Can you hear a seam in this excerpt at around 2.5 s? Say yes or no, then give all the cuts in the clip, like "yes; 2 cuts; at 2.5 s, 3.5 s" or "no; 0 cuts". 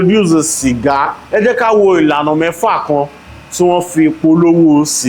no; 1 cut; at 1.2 s